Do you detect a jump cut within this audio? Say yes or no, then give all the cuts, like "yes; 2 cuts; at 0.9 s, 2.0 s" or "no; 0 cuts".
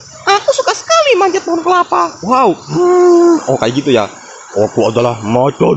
yes; 1 cut; at 2.7 s